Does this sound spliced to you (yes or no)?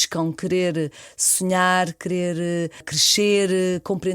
yes